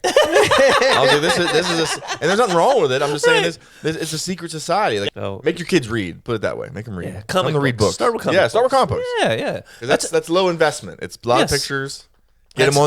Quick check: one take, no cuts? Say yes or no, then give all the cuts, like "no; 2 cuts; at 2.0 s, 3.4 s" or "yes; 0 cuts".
no; 1 cut; at 5.1 s